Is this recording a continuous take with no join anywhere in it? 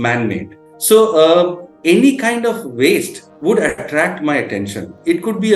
no; 1 cut; at 1.7 s

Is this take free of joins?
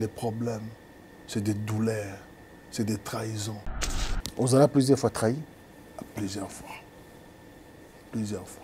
no; 1 cut; at 3.9 s

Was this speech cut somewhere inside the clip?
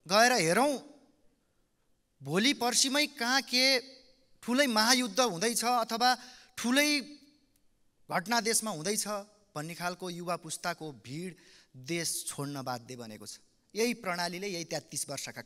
no; 0 cuts

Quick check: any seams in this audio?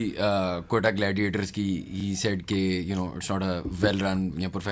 no; 0 cuts

